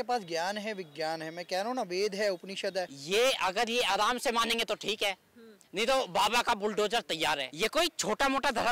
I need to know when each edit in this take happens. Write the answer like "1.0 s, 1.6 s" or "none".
3.0 s, 7.5 s